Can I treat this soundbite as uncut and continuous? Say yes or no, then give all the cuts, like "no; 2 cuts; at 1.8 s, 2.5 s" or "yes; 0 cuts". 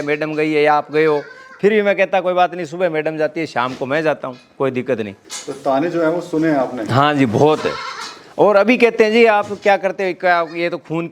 yes; 0 cuts